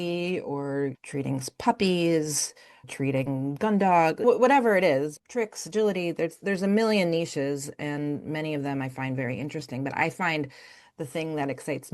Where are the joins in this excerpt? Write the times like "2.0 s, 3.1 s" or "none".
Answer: 1.0 s, 2.9 s, 4.2 s, 5.2 s